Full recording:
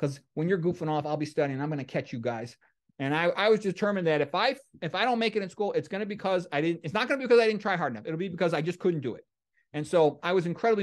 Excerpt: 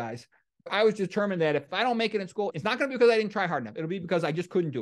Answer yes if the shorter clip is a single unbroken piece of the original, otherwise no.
no